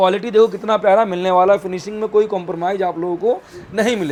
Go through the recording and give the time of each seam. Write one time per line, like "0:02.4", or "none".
none

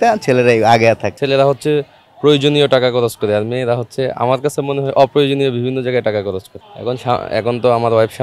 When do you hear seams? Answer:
0:01.2
0:06.6

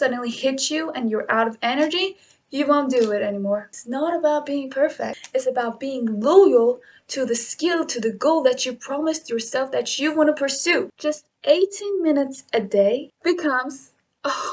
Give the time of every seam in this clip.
0:03.8
0:05.2
0:10.9
0:13.1

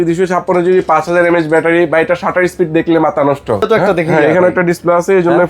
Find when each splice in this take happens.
0:03.7

